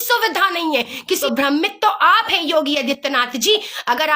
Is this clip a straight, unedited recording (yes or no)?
no